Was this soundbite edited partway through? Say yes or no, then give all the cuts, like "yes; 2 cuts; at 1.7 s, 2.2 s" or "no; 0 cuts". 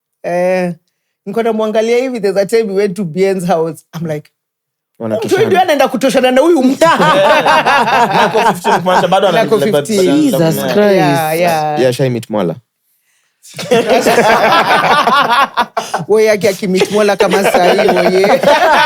no; 0 cuts